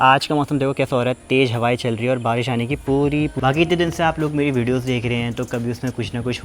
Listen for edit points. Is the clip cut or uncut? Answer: cut